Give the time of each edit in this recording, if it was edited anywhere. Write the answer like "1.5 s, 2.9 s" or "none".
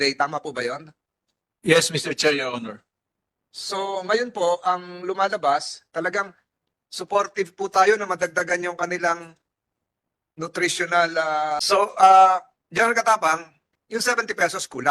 11.6 s